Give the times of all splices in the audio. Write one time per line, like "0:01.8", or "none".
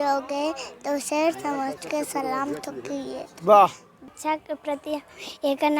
0:04.1